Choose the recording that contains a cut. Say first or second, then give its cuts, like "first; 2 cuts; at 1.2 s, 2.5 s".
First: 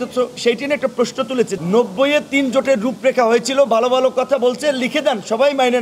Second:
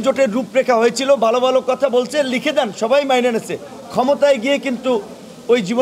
first; 1 cut; at 1.5 s